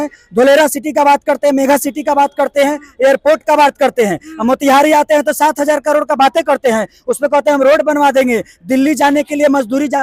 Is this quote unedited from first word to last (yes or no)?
yes